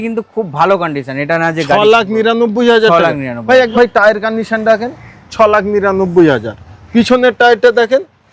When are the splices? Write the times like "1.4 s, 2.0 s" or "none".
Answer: 3.7 s